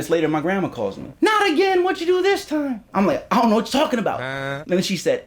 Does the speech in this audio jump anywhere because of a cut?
yes; 2 cuts; at 1.1 s, 2.9 s

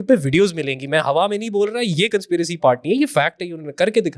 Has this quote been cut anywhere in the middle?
no; 0 cuts

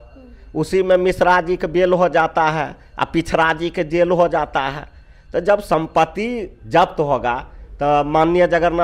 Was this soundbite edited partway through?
no; 0 cuts

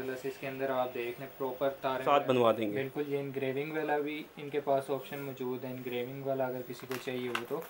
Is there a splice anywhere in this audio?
yes; 1 cut; at 2.0 s

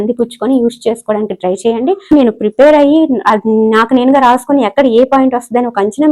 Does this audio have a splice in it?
yes; 1 cut; at 2.1 s

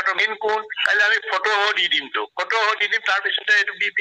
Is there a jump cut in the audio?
no; 0 cuts

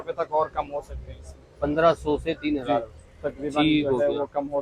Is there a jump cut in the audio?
no; 0 cuts

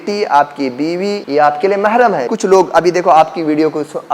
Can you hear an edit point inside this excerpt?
yes; 2 cuts; at 1.2 s, 2.3 s

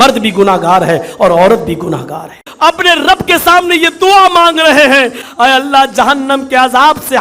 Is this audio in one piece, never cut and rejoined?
no; 2 cuts; at 2.4 s, 5.2 s

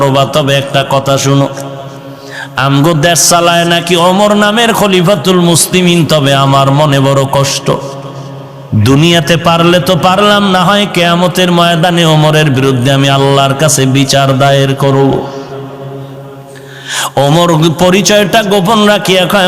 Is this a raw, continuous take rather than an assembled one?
yes; 0 cuts

